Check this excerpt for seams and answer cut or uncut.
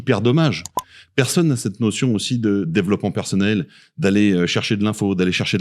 uncut